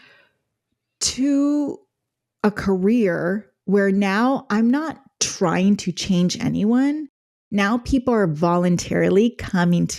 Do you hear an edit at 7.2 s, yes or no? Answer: no